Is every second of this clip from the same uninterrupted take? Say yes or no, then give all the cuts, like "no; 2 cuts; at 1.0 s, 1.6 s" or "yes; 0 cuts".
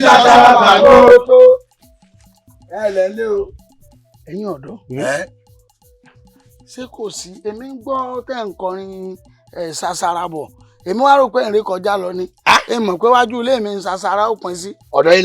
no; 1 cut; at 1.1 s